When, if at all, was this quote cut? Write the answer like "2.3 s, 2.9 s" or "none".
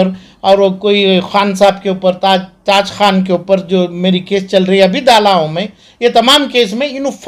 none